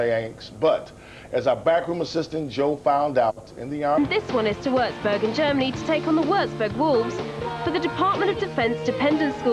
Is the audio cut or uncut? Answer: uncut